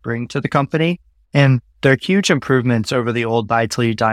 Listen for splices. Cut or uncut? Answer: cut